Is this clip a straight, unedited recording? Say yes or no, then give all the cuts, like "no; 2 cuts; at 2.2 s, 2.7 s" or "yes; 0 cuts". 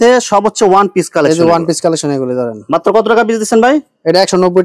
yes; 0 cuts